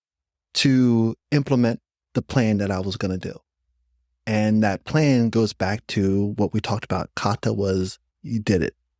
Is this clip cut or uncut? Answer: uncut